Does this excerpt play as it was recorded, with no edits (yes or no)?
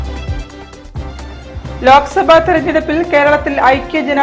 no